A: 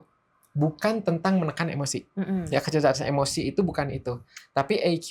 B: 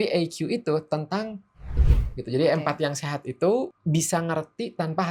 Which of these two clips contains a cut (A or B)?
B